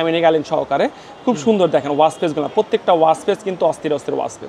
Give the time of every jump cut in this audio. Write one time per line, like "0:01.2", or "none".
none